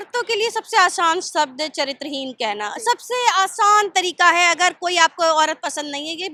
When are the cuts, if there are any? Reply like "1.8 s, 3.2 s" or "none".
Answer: none